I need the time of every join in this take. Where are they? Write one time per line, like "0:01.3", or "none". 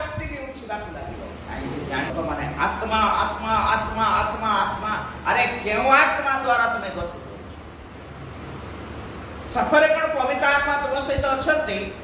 0:02.1